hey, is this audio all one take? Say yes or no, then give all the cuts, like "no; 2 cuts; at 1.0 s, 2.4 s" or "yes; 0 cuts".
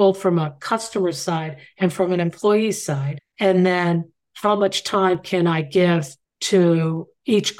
yes; 0 cuts